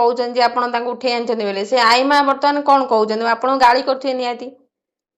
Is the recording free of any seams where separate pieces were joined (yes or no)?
yes